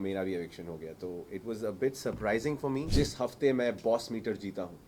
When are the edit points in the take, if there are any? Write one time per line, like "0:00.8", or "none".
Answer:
0:02.9